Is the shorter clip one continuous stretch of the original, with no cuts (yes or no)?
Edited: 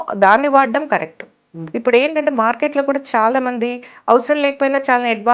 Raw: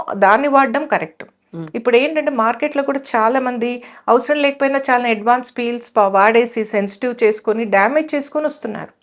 yes